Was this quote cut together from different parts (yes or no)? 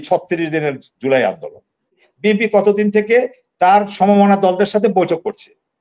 yes